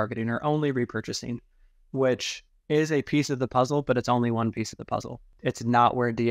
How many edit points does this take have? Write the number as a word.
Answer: one